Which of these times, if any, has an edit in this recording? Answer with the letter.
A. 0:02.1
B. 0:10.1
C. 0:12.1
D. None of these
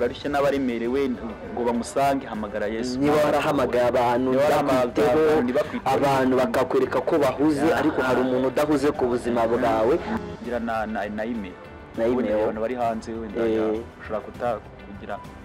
B